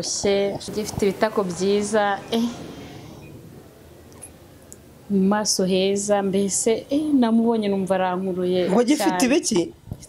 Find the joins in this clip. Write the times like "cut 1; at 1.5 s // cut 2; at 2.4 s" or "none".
none